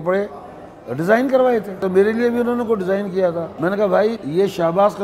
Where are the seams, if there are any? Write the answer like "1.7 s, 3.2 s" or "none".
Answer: 1.8 s, 3.5 s, 4.2 s